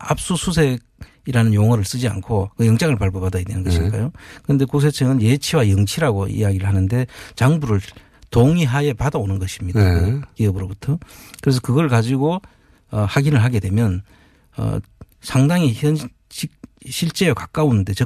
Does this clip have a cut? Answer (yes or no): yes